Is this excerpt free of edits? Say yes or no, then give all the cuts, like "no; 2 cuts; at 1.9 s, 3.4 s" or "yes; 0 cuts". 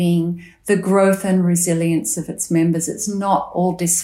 yes; 0 cuts